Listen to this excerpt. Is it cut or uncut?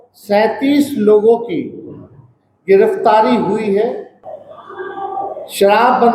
cut